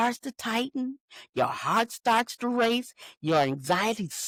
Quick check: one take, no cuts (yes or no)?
yes